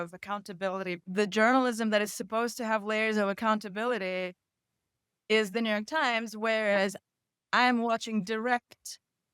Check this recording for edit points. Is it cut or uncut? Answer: cut